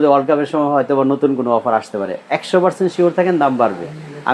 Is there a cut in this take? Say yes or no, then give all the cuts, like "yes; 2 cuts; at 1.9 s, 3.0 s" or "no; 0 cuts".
no; 0 cuts